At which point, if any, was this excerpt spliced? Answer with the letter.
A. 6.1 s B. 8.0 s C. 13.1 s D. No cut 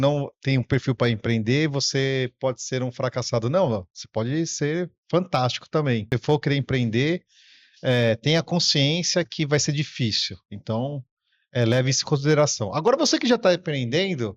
A